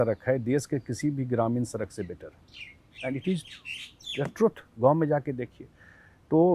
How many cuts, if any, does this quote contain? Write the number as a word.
zero